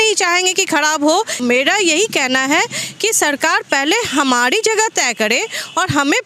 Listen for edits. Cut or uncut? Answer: cut